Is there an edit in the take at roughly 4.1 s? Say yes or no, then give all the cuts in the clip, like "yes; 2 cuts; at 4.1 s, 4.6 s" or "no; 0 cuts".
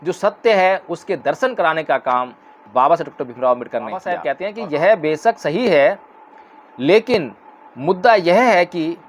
yes; 1 cut; at 4.1 s